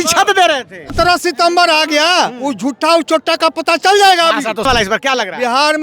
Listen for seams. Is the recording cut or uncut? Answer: cut